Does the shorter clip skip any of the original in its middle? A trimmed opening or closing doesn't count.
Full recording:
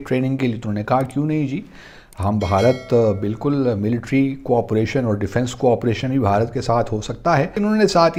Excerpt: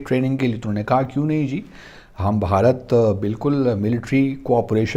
no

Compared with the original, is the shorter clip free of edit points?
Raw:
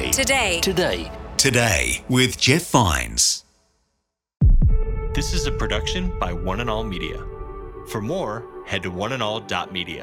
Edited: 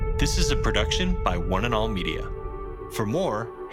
yes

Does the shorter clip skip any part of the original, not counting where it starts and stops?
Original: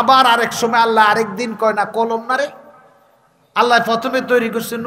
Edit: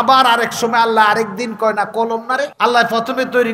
yes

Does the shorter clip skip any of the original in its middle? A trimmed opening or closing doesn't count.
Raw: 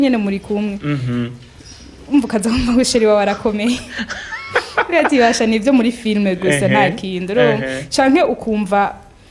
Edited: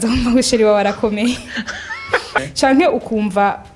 yes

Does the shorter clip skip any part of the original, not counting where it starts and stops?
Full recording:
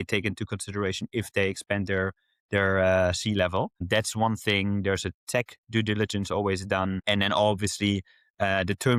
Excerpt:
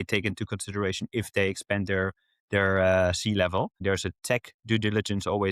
yes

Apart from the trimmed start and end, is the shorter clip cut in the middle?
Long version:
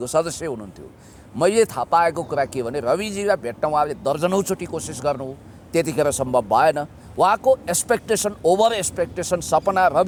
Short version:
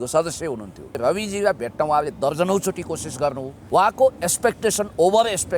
yes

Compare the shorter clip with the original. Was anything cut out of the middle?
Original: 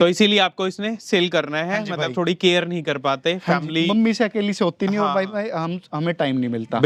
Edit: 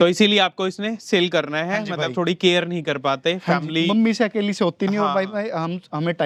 no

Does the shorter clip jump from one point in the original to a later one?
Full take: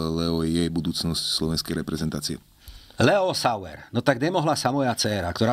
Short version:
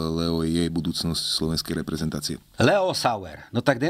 yes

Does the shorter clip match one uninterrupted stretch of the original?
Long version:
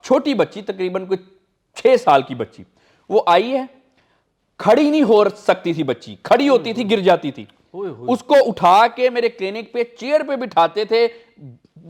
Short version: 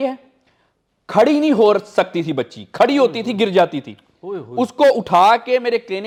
yes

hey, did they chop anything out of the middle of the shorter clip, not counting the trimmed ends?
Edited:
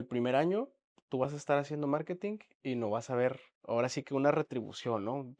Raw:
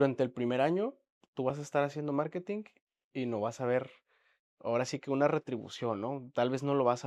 yes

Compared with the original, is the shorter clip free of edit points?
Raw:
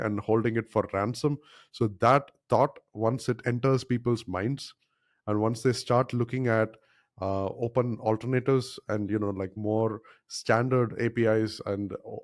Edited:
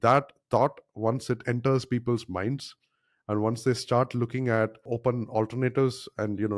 no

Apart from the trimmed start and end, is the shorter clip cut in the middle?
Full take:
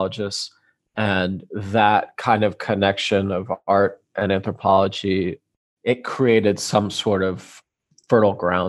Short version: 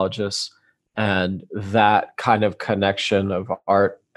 no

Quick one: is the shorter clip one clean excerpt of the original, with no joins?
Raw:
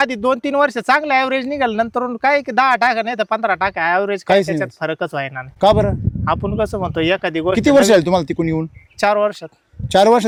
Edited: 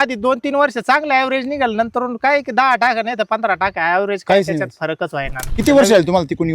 no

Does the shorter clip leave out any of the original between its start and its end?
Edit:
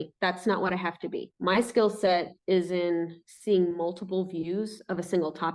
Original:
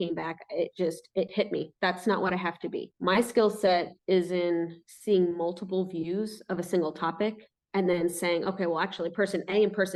no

